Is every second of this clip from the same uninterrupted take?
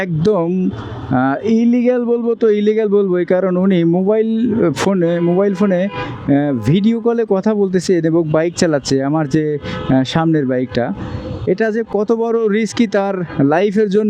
yes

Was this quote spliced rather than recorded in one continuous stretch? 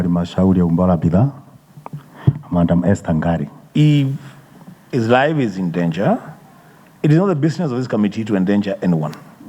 yes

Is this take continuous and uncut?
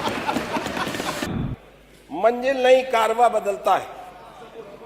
no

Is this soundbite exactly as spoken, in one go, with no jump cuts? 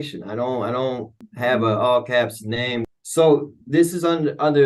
no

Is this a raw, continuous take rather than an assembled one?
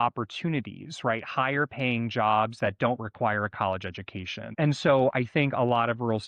no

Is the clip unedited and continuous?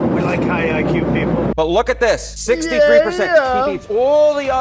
no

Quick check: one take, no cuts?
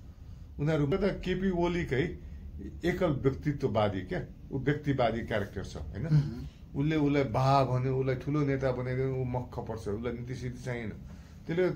no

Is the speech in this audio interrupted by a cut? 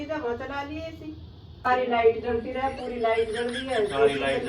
yes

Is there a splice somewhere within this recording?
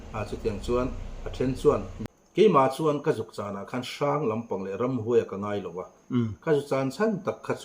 yes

